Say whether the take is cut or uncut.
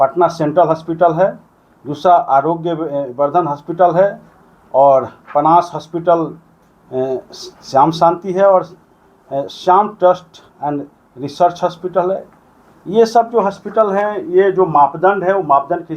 uncut